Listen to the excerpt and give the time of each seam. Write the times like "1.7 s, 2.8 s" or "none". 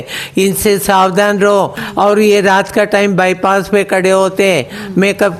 1.8 s